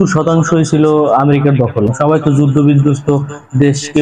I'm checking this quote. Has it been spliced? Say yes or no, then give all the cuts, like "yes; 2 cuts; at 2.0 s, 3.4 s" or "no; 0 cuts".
yes; 1 cut; at 1.9 s